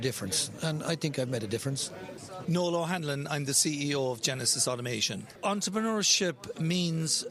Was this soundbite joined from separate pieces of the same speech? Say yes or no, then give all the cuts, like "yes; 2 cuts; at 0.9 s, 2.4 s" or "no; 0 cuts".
no; 0 cuts